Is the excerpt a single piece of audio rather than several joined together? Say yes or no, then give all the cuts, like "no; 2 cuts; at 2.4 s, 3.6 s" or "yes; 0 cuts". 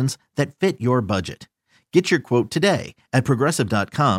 yes; 0 cuts